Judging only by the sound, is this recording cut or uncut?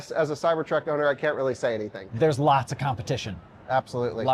cut